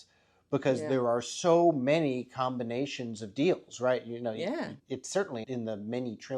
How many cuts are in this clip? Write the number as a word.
one